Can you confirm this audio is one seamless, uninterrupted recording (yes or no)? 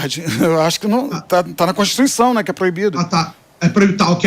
yes